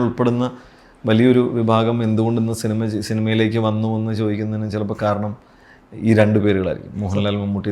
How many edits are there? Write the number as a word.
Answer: zero